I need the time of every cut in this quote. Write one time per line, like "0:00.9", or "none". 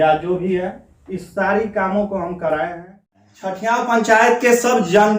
0:03.3